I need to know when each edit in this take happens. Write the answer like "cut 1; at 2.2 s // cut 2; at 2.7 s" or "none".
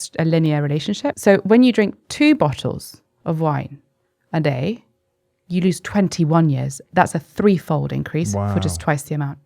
cut 1; at 1.1 s

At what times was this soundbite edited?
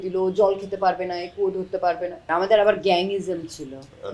cut 1; at 2.2 s

